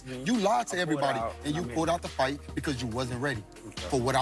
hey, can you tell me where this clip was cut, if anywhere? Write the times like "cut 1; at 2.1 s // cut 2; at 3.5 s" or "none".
none